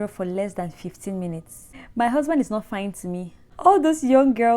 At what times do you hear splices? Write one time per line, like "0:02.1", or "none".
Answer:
0:01.8
0:03.4